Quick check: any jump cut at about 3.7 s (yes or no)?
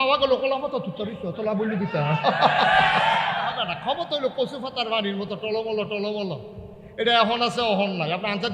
yes